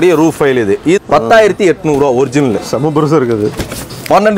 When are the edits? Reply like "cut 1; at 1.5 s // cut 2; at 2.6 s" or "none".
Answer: cut 1; at 1.0 s